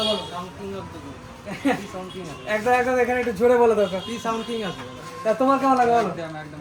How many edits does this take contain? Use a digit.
0